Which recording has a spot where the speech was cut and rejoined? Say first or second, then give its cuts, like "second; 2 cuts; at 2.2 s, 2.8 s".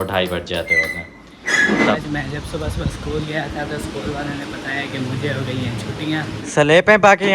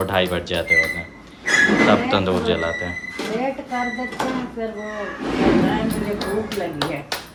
first; 2 cuts; at 2.0 s, 6.4 s